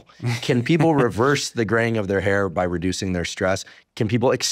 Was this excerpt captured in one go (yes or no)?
yes